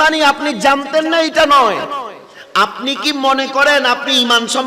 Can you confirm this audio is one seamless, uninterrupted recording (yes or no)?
yes